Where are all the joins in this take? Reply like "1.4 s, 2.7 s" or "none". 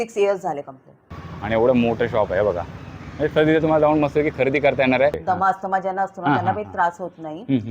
1.1 s, 5.2 s